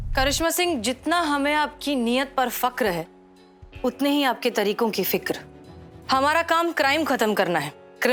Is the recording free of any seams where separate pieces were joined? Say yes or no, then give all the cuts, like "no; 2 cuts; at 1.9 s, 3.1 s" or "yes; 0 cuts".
yes; 0 cuts